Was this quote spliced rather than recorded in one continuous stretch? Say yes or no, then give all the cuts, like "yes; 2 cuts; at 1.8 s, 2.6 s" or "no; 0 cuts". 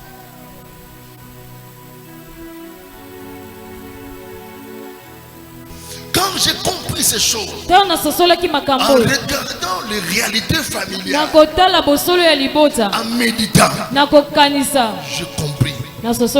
yes; 1 cut; at 5.7 s